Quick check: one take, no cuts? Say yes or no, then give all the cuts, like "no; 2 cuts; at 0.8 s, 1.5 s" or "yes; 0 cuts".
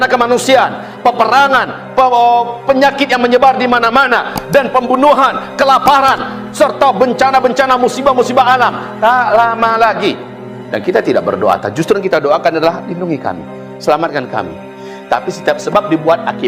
no; 1 cut; at 10.6 s